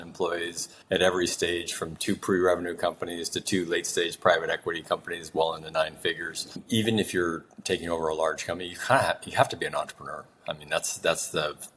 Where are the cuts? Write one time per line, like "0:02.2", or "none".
0:06.6

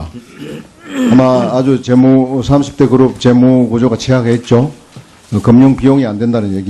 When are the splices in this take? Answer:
0:02.0

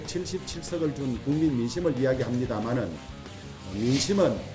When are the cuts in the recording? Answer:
none

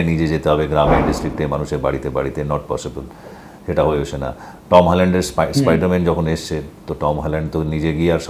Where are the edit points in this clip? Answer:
none

